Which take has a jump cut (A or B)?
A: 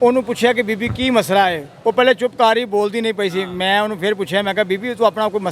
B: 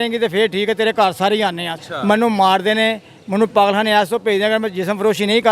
B